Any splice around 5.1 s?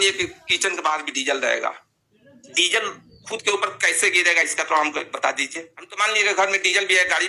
no; 0 cuts

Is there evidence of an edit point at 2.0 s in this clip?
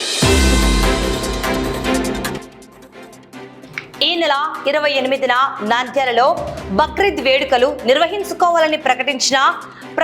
yes; 1 cut; at 2.0 s

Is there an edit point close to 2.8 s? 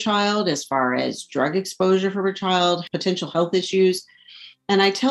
yes; 1 cut; at 2.8 s

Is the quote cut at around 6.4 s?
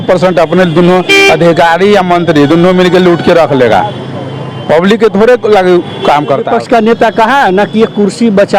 yes; 1 cut; at 6.4 s

